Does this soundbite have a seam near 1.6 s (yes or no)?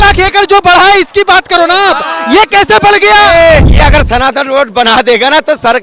no